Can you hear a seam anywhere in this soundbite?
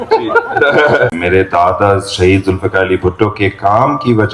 yes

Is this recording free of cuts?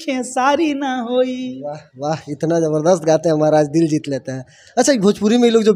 yes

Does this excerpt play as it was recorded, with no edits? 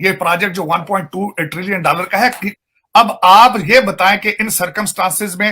no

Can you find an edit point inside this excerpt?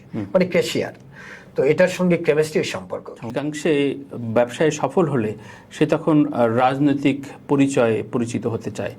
yes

